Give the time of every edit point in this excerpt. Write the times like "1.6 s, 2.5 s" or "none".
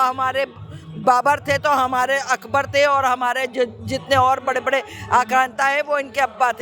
none